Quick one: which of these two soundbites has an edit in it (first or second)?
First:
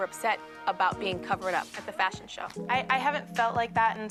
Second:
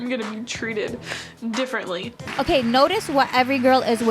second